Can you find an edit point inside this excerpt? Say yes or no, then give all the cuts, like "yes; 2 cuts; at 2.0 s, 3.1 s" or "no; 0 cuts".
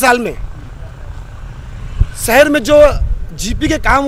no; 0 cuts